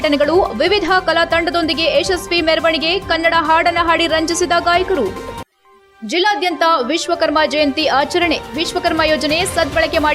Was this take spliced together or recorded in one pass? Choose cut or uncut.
uncut